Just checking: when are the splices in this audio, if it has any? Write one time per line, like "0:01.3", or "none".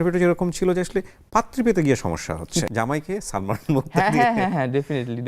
0:02.6

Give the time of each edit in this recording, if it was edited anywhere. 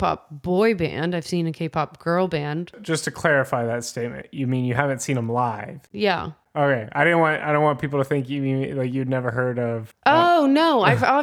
0:02.8
0:06.2

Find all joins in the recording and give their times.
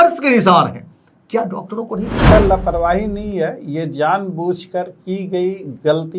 0:02.3

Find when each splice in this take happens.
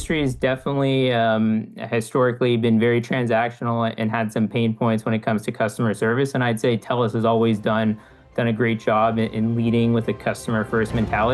none

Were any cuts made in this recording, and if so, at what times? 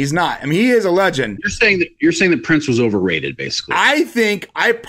0:01.4

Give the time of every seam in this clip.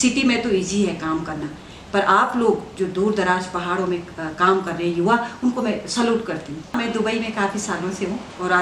0:06.7

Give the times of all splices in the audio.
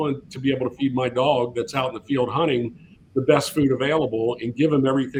none

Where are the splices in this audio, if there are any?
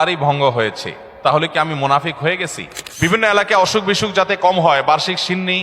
0:03.1

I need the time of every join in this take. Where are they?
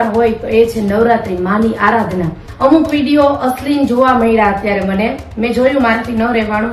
0:02.4

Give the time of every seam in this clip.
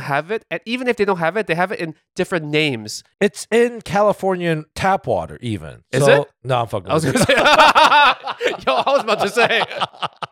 none

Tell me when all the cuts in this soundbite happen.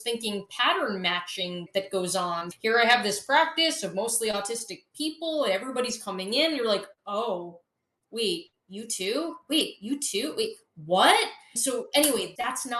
none

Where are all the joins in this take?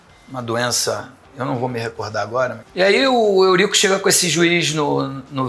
0:02.6

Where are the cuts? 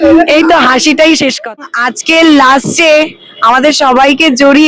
0:01.6

